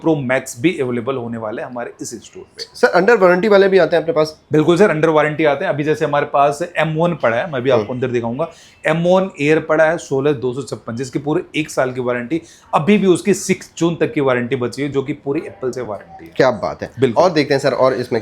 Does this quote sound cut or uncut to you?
uncut